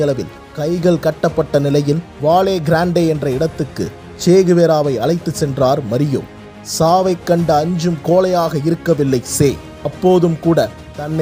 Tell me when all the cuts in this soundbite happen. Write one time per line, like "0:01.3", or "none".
none